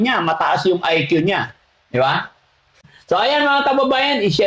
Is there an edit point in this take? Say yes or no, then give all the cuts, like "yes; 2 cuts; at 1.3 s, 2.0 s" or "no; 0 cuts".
yes; 1 cut; at 2.9 s